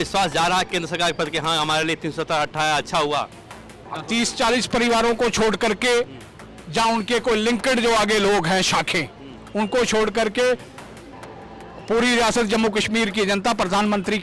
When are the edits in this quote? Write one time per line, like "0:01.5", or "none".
none